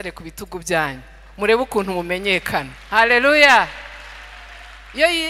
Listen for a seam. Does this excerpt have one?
no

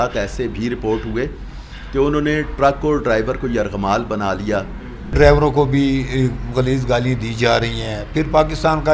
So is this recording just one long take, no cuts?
no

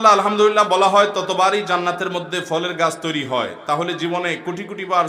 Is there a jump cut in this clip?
no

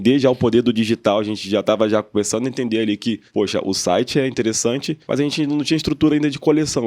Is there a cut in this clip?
yes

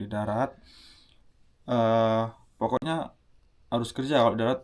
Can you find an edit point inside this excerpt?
no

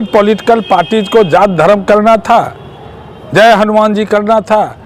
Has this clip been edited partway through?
no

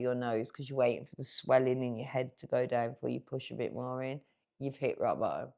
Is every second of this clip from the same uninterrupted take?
yes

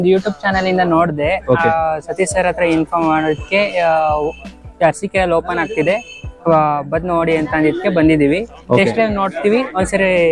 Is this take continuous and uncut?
yes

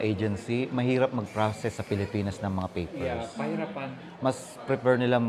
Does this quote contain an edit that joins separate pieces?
no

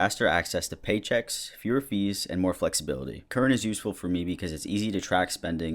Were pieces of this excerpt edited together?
yes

